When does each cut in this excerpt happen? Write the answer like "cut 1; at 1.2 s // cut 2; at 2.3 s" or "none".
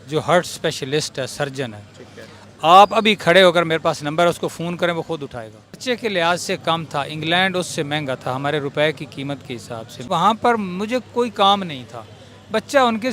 cut 1; at 5.8 s // cut 2; at 10.0 s